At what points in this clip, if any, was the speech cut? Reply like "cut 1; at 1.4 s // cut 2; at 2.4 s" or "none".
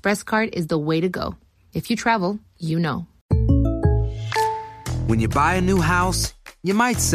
cut 1; at 3.1 s

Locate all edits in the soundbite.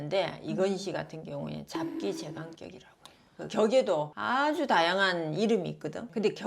none

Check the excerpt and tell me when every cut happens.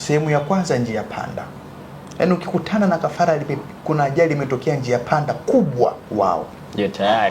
cut 1; at 6.0 s

